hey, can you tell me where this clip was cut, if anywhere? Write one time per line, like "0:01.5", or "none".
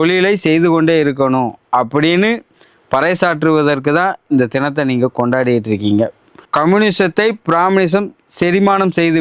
0:06.4

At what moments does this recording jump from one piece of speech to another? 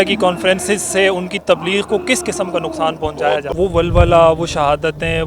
0:03.5

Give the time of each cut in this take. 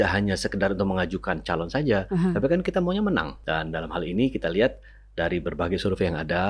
0:03.4

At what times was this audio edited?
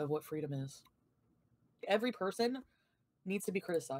0:01.8

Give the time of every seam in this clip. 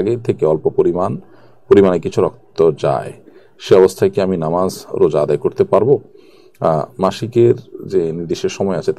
none

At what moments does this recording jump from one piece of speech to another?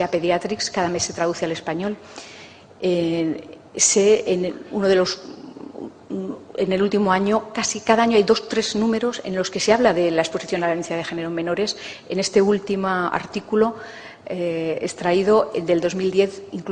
0:07.7

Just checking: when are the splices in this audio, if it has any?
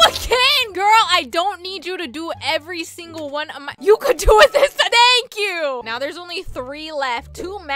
0:05.9

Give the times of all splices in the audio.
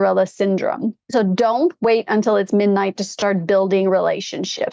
0:00.9

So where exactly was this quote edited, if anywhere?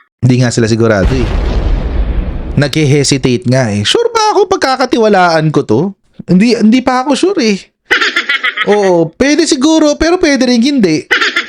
none

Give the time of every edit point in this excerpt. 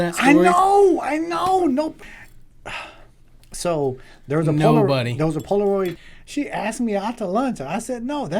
0:02.0
0:06.0

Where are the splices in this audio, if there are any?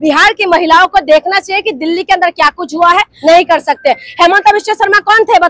0:03.1

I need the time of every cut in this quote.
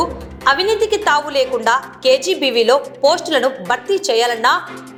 none

